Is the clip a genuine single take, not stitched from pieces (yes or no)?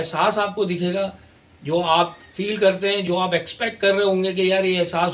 no